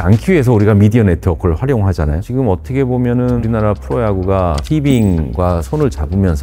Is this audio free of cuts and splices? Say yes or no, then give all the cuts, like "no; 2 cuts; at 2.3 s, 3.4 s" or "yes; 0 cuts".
yes; 0 cuts